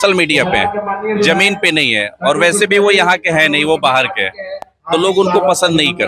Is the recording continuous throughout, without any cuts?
yes; 0 cuts

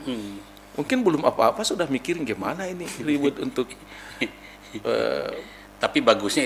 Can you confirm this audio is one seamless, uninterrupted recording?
yes; 0 cuts

